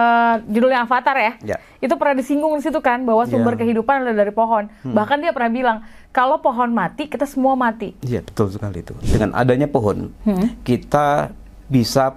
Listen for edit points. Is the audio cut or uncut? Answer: cut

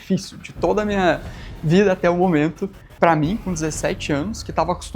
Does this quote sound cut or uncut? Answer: cut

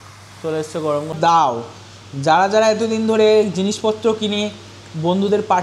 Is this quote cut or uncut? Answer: cut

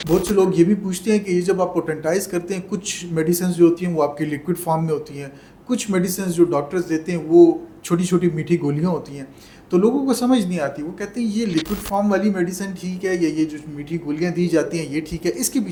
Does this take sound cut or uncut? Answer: uncut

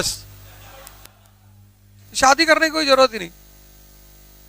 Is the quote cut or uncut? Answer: cut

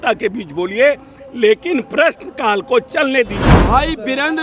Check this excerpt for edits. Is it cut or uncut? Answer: cut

